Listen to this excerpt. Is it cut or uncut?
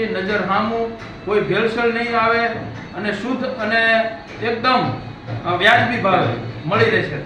uncut